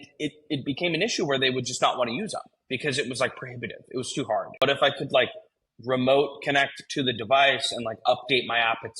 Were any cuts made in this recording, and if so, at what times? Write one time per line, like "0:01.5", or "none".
0:04.6